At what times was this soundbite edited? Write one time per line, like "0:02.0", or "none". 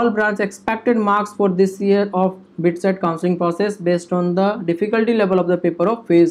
none